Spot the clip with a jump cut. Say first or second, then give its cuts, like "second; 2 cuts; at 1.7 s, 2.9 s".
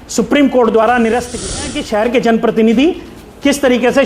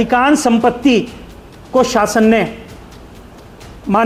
first; 1 cut; at 1.9 s